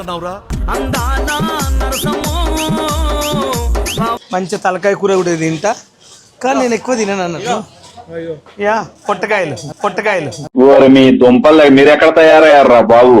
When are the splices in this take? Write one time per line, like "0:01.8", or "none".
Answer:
0:04.2

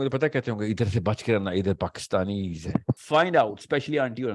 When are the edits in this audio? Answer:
0:03.0

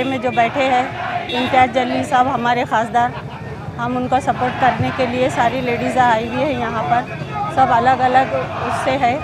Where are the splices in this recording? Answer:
none

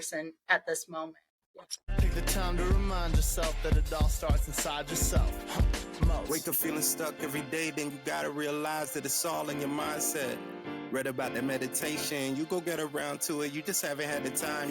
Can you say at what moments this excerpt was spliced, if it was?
0:01.8

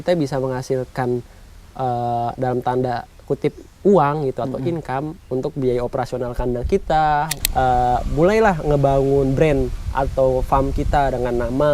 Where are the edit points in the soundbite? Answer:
0:07.3

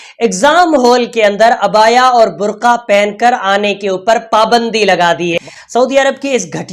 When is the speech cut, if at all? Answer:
0:05.4

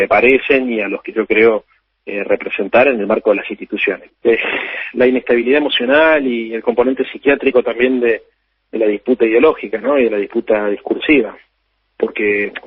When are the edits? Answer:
0:04.1

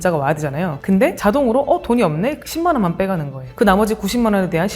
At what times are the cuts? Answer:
0:01.0
0:03.5

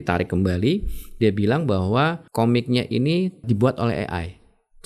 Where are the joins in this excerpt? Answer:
0:02.2
0:03.4

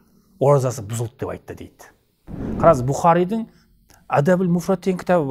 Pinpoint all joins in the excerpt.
0:02.5

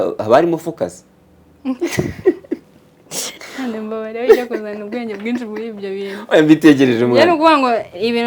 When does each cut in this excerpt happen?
none

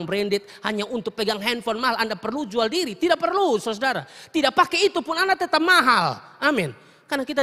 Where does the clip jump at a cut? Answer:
none

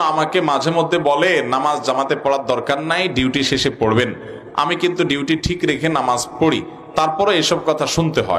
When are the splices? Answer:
none

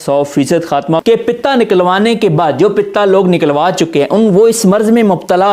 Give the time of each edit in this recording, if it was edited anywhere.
0:01.0

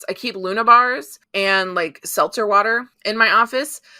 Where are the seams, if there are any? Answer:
0:01.1
0:02.9

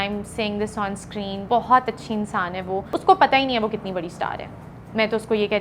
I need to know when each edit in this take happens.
0:01.4
0:03.0

